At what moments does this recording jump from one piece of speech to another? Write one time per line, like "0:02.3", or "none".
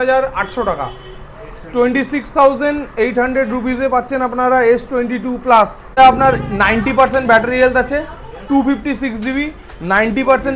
0:06.0